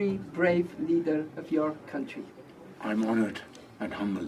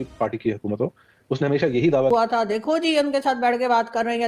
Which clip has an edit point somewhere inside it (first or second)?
second